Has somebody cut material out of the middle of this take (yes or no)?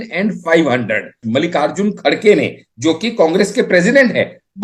yes